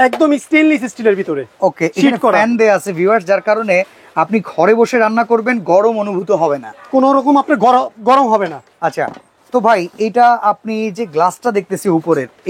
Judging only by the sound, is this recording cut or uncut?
uncut